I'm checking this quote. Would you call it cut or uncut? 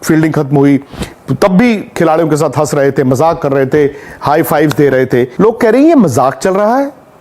cut